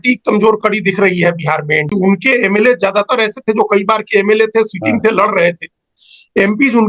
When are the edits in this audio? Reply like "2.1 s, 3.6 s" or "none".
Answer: 1.9 s